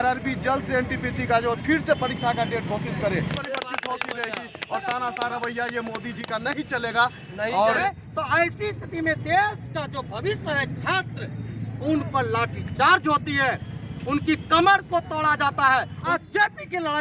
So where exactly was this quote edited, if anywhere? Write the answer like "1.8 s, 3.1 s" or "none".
3.4 s, 7.8 s, 16.1 s

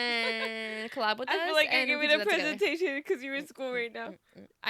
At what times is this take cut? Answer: none

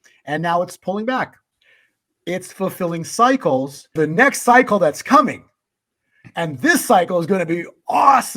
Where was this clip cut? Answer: 1.5 s, 3.9 s

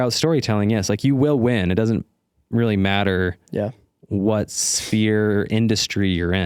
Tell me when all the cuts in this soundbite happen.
none

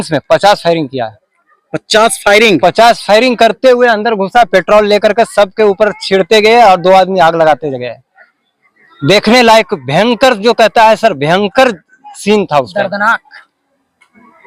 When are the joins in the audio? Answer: none

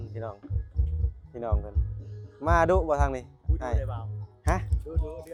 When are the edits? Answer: none

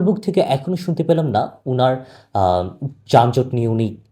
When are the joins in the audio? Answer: none

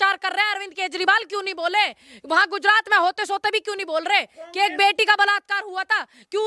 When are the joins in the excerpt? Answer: none

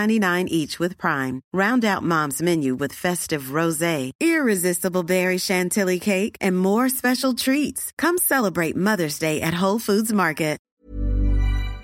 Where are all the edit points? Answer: 10.6 s

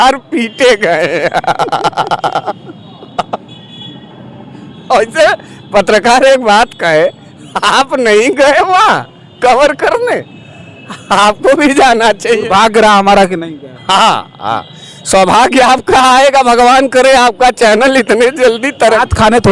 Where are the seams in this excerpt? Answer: none

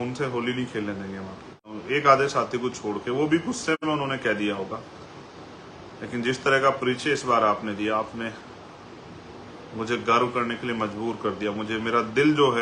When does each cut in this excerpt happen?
1.8 s

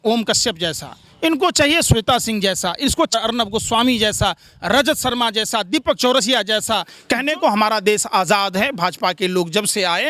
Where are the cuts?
6.9 s

